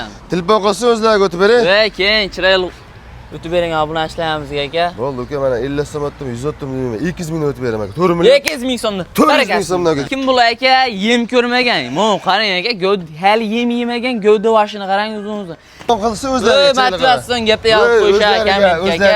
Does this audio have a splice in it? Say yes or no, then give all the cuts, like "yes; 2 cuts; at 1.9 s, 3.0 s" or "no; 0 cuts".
yes; 2 cuts; at 10.0 s, 15.9 s